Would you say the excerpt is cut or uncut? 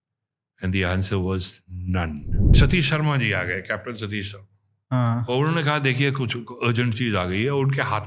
cut